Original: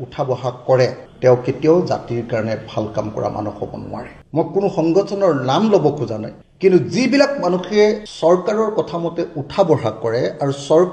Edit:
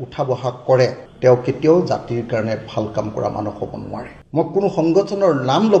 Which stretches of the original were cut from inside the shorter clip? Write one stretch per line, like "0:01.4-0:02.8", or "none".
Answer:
none